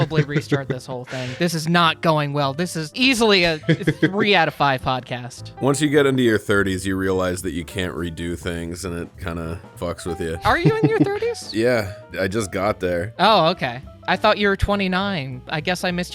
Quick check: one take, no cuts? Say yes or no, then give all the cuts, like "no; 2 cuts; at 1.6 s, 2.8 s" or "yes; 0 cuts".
yes; 0 cuts